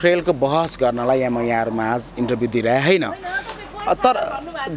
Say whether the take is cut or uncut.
uncut